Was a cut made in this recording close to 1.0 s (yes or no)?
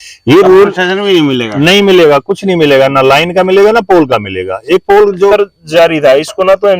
no